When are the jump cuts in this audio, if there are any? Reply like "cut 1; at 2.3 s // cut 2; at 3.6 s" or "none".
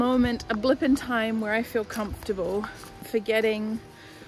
cut 1; at 3.1 s